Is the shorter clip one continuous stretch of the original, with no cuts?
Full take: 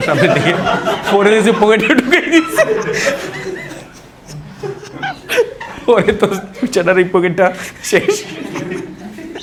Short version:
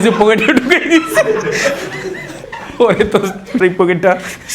no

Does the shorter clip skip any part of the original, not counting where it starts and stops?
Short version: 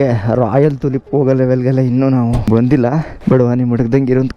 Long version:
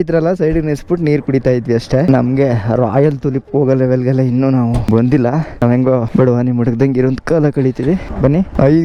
yes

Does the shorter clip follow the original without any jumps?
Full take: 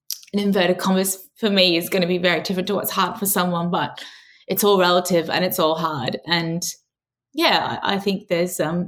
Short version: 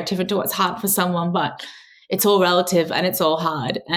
yes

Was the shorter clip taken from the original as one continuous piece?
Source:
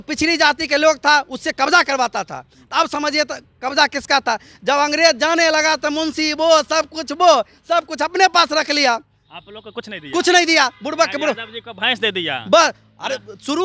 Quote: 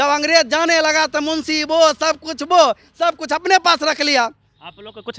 yes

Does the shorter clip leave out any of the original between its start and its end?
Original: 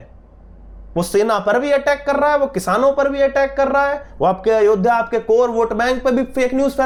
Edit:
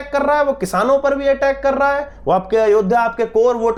no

